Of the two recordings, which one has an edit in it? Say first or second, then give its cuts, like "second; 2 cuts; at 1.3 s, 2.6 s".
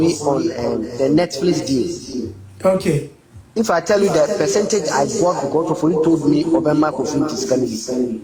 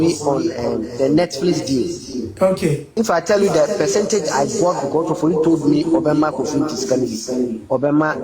second; 2 cuts; at 2.3 s, 2.8 s